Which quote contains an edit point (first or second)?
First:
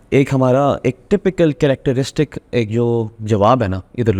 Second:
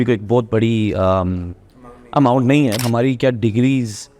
second